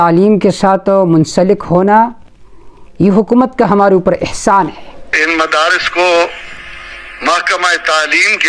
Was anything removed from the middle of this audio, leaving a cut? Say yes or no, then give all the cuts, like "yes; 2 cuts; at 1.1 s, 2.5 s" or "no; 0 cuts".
yes; 1 cut; at 5.2 s